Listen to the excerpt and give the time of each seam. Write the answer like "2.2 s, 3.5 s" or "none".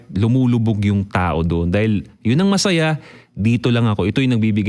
none

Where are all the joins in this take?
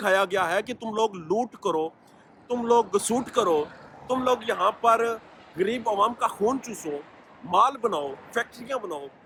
none

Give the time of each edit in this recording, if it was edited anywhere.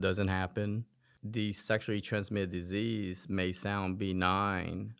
1.2 s

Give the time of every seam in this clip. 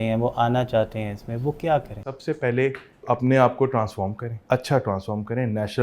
2.1 s, 3.0 s, 4.3 s

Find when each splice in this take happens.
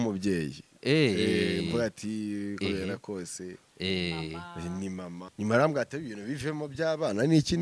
5.3 s

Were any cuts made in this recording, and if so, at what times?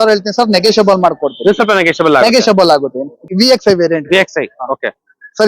3.2 s

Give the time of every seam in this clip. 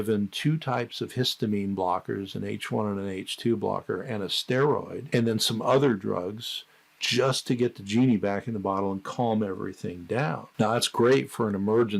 10.4 s

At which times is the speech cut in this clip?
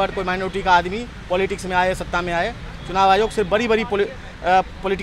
none

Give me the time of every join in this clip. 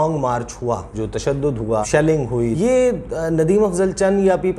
0.9 s, 2.0 s

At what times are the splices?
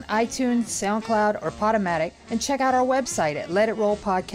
none

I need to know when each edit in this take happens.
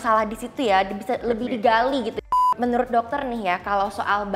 2.4 s

